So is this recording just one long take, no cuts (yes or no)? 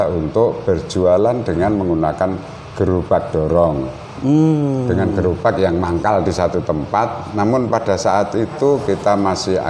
yes